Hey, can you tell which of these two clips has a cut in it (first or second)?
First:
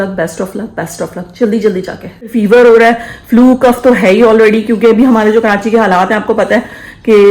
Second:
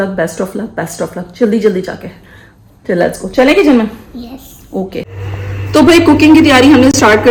first